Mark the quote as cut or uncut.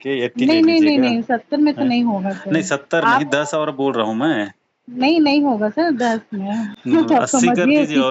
uncut